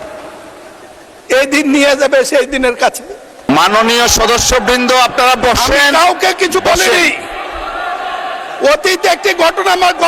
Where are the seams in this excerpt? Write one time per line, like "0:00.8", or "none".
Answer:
0:03.4

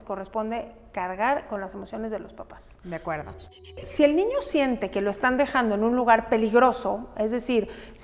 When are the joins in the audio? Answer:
0:03.8

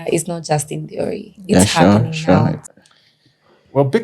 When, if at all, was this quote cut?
0:02.6

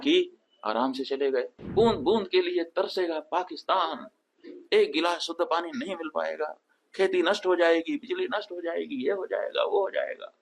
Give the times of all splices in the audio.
0:01.6

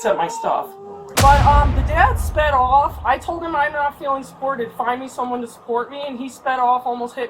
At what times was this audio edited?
0:01.2

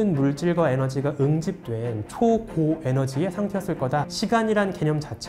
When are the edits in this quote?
0:04.1

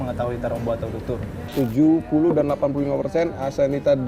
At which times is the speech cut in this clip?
0:01.5

